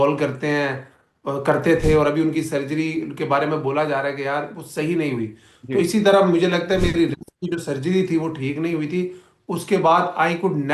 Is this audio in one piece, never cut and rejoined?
yes; 0 cuts

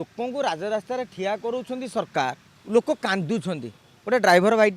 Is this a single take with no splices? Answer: no; 1 cut; at 2.5 s

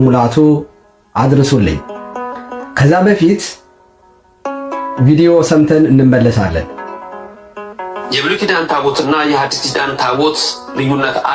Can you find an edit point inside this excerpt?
no; 0 cuts

